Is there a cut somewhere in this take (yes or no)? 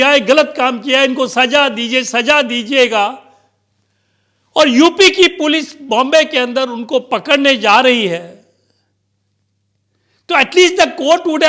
no